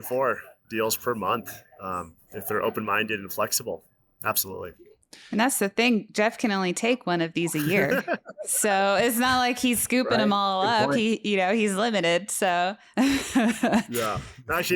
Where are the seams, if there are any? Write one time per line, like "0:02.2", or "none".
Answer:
none